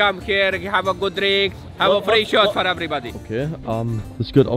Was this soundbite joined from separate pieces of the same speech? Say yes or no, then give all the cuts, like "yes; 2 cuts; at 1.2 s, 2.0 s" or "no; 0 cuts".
no; 0 cuts